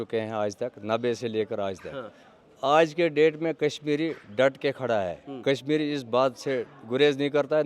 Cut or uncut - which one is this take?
uncut